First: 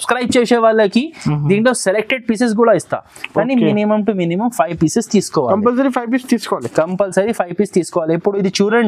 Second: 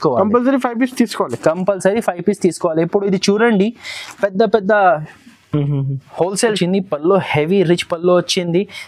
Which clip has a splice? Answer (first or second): second